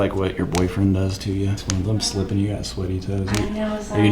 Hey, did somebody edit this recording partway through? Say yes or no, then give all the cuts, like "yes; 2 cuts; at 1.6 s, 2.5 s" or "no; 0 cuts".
yes; 1 cut; at 1.6 s